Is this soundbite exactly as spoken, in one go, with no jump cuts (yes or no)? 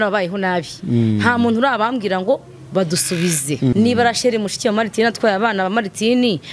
no